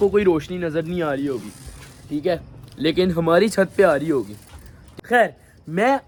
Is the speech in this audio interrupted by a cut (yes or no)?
no